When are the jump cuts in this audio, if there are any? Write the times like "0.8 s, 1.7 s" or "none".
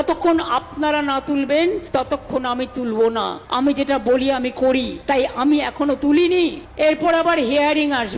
1.8 s, 3.4 s, 5.3 s, 6.6 s